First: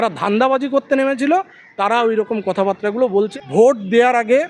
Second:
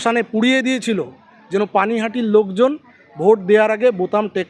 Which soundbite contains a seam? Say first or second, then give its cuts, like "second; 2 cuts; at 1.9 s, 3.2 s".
first; 1 cut; at 3.4 s